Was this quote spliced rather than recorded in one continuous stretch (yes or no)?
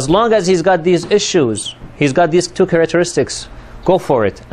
yes